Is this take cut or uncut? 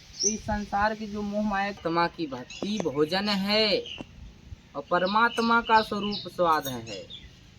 cut